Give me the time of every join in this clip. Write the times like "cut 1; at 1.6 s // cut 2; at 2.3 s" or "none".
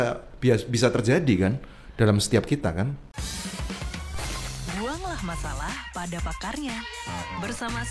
cut 1; at 3.0 s